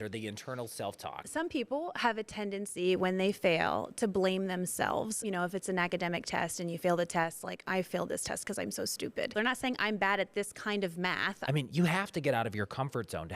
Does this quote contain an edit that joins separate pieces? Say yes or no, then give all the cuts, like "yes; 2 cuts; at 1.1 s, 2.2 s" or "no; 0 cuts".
yes; 4 cuts; at 1.2 s, 5.2 s, 9.3 s, 11.4 s